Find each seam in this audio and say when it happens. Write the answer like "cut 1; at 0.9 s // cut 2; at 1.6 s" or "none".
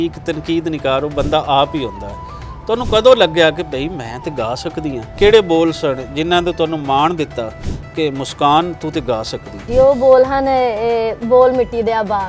cut 1; at 5.1 s // cut 2; at 9.6 s